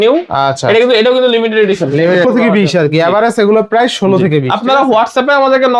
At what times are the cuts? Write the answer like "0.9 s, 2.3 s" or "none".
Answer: 2.2 s